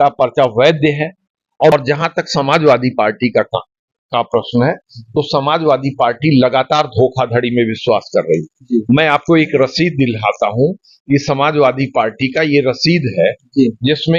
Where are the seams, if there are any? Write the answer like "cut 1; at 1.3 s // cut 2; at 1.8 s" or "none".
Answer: cut 1; at 1.7 s